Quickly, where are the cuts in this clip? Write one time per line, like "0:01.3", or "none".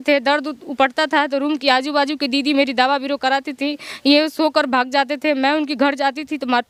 none